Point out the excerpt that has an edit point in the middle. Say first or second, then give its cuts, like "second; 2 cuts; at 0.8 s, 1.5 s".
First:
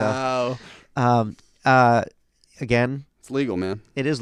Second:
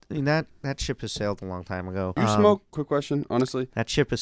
second; 2 cuts; at 2.1 s, 2.7 s